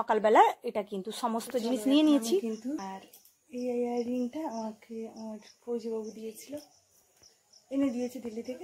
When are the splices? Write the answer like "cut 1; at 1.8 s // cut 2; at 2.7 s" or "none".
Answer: cut 1; at 2.8 s

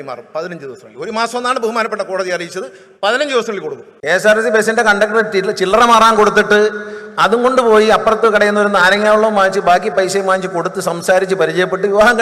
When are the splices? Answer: cut 1; at 3.9 s

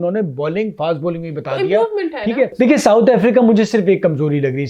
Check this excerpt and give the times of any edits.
cut 1; at 2.5 s

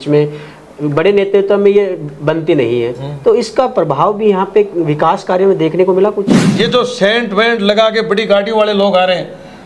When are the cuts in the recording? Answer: cut 1; at 6.4 s

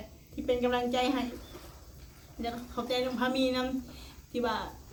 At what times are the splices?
none

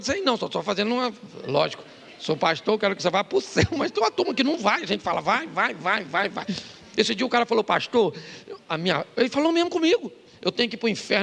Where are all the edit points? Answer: none

